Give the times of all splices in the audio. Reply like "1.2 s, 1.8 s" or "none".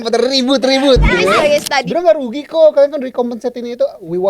1.8 s